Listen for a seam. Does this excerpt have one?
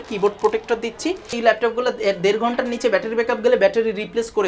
yes; 1 cut; at 1.4 s

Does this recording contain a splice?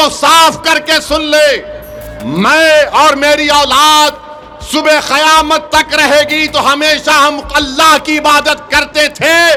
no; 0 cuts

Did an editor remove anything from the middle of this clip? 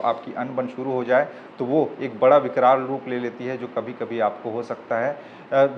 no; 0 cuts

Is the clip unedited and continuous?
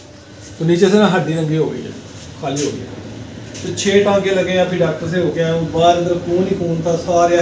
yes; 0 cuts

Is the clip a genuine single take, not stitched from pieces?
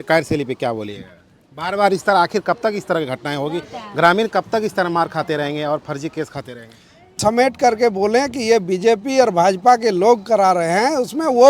no; 1 cut; at 7.2 s

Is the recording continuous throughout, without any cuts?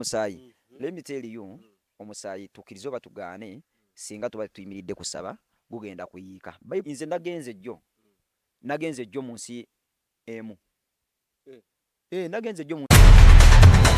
no; 2 cuts; at 6.8 s, 12.9 s

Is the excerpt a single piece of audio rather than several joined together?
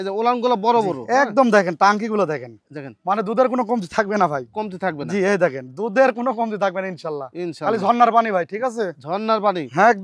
yes; 0 cuts

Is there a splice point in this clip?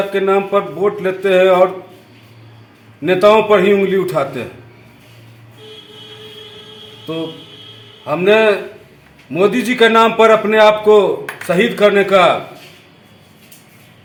no; 0 cuts

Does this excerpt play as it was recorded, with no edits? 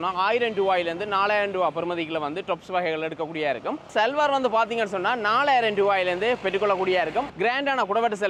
yes; 0 cuts

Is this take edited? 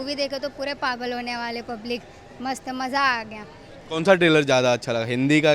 no; 0 cuts

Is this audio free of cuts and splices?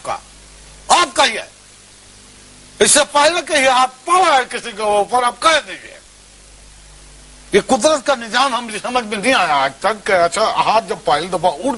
yes; 0 cuts

